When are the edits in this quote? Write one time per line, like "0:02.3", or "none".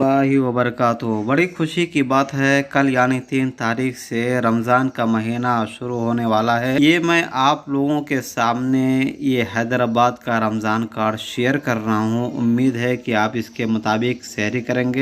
0:06.8